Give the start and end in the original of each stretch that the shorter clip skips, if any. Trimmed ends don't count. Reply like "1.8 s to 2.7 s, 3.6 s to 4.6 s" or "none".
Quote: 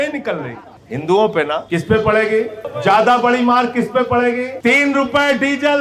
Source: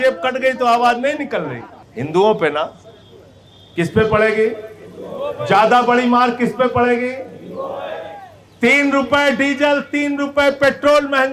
2.7 s to 3.7 s, 4.7 s to 5.3 s, 7.2 s to 8.5 s